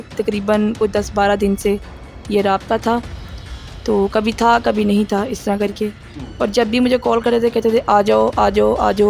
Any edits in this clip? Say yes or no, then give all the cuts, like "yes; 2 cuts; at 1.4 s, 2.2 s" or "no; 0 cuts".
no; 0 cuts